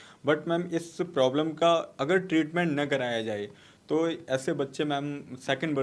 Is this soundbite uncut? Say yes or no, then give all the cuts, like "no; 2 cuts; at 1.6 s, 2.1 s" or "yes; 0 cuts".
yes; 0 cuts